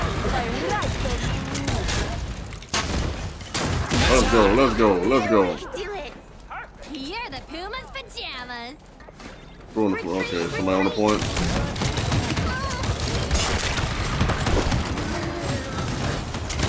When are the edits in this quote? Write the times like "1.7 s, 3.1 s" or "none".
9.0 s